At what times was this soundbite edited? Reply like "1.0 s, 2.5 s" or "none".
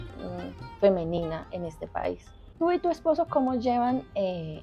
2.4 s